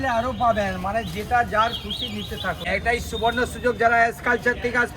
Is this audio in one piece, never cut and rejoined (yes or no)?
no